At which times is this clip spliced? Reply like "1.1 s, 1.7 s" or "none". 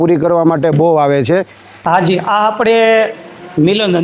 1.8 s